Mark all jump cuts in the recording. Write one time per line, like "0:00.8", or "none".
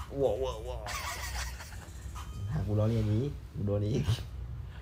none